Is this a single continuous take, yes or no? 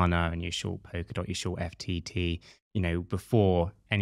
yes